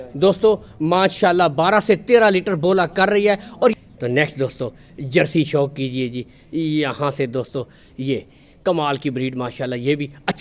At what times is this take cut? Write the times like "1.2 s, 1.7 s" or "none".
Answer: 3.7 s